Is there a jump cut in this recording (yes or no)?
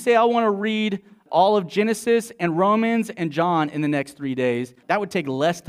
yes